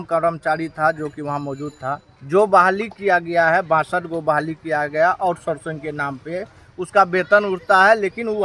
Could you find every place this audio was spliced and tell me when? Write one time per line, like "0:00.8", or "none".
none